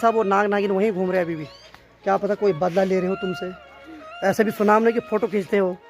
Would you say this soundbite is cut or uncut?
uncut